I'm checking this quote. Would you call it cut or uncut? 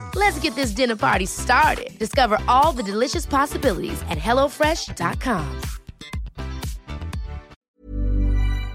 cut